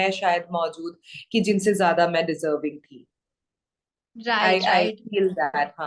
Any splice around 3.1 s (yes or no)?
no